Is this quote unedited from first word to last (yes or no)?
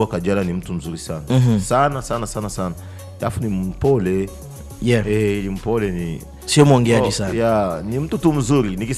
yes